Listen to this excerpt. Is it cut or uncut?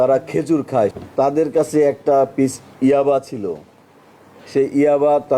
cut